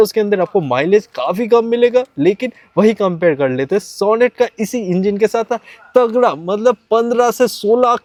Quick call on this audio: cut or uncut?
uncut